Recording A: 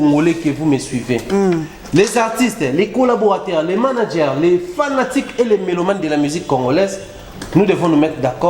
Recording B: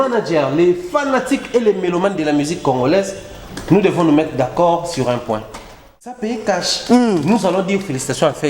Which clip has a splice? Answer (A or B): B